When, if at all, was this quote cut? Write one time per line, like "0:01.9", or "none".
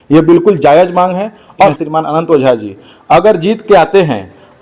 0:01.7